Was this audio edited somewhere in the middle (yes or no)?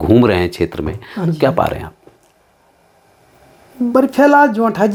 no